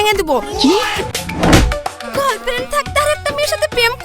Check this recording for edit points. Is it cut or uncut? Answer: cut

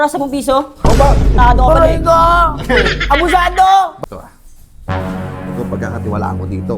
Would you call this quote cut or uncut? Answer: cut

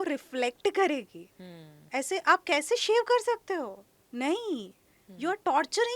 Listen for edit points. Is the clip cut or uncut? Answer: uncut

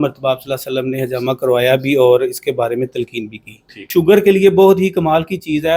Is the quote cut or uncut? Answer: cut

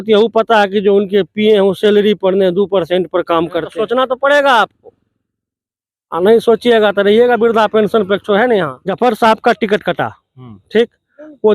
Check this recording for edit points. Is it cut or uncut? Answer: cut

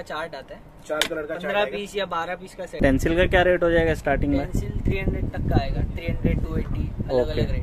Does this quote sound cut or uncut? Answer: cut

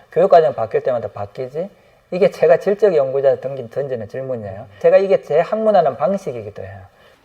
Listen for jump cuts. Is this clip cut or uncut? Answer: cut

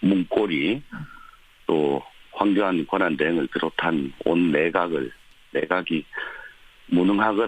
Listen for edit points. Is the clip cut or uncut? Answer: cut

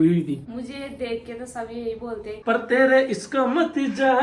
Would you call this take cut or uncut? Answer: cut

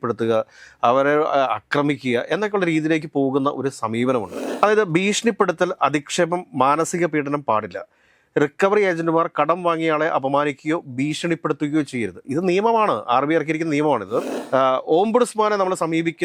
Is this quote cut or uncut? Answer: cut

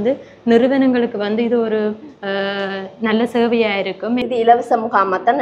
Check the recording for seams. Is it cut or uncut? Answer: cut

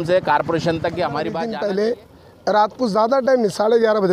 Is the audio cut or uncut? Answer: cut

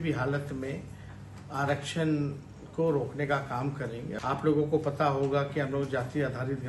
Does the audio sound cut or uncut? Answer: cut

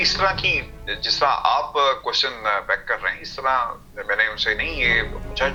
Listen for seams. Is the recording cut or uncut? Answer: uncut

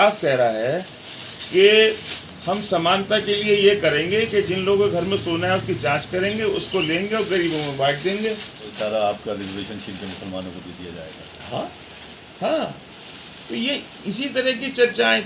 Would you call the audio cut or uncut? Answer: cut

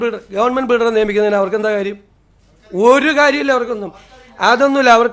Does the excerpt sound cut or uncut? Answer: uncut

